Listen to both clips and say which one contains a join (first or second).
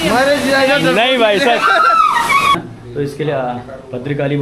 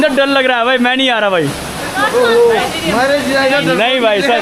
first